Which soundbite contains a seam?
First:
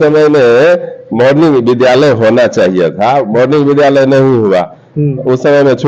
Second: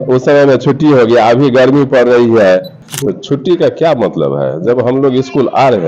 second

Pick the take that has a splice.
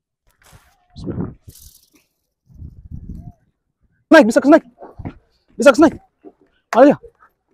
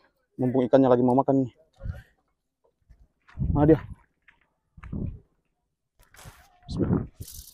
first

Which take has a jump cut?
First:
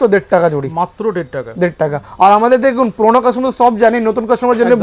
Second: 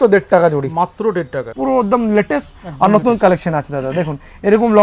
second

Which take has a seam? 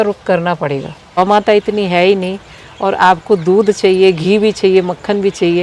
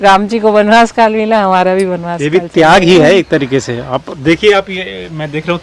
first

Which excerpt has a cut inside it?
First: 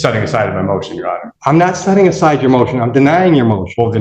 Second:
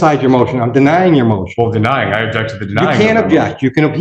first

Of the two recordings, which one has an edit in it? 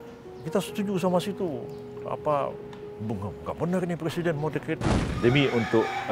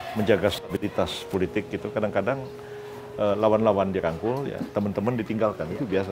first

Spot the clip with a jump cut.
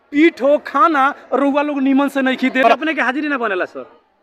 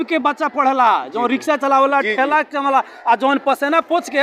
first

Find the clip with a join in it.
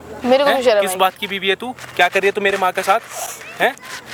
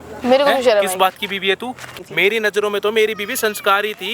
second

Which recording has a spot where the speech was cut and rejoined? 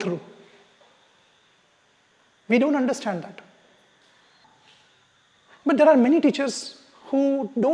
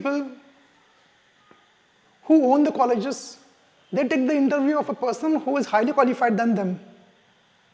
first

